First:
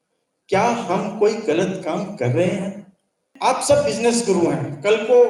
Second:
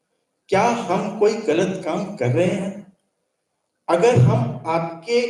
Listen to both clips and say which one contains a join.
first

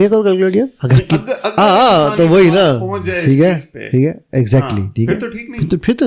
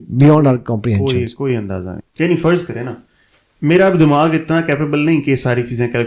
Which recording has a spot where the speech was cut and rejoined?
second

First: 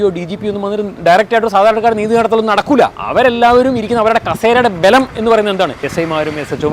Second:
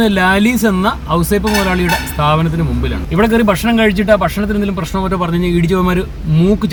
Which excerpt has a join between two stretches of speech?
first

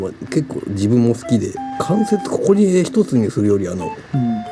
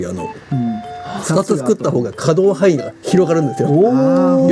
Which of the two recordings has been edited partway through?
first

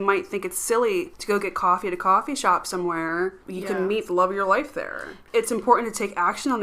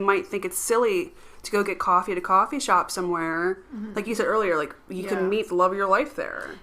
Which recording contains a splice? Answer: first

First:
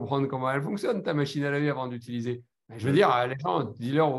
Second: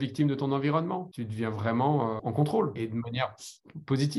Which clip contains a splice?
second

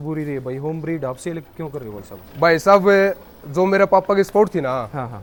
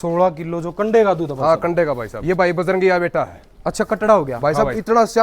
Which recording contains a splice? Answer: second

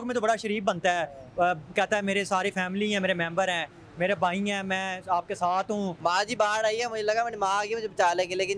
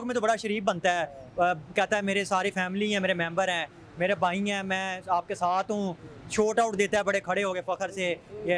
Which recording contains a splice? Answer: first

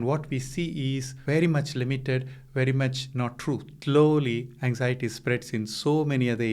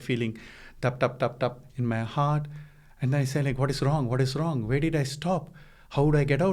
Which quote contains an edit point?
first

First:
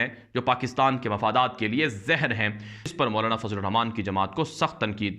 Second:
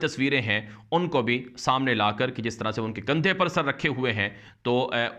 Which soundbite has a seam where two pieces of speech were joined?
first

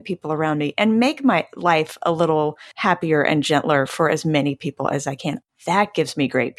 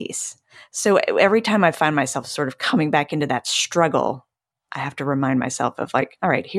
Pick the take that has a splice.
first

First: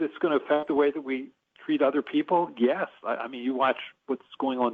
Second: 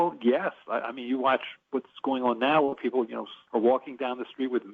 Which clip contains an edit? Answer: second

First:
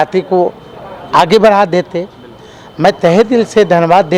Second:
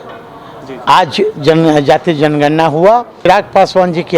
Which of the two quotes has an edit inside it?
second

